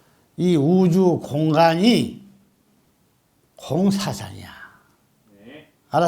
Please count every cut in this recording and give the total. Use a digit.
0